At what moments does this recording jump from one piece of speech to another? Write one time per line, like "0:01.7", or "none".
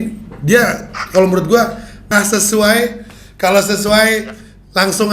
0:02.1